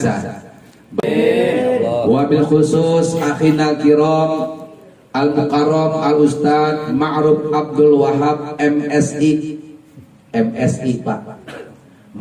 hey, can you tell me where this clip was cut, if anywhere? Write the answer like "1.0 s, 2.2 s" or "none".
1.0 s

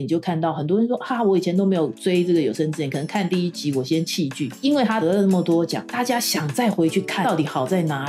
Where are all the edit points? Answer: 4.9 s, 5.8 s, 7.2 s

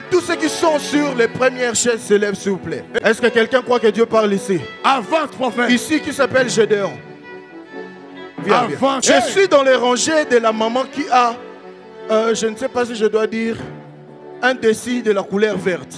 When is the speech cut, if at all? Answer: 3.0 s, 9.0 s

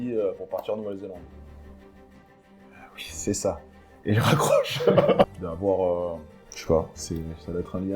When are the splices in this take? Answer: 5.2 s

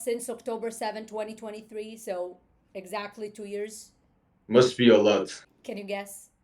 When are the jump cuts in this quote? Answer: 5.5 s

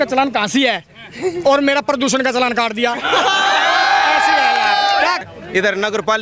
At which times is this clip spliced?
5.2 s

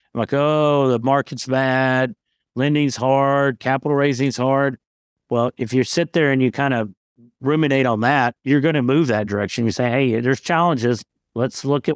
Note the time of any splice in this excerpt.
none

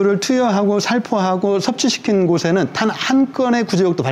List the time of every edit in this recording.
none

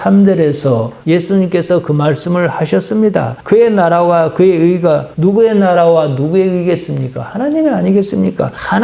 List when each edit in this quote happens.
3.4 s

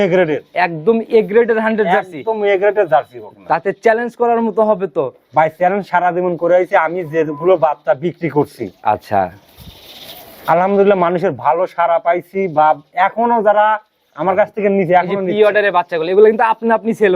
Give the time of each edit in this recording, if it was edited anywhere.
none

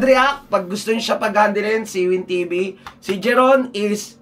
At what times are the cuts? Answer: none

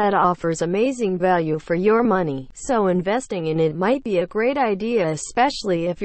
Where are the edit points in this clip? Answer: 1.0 s

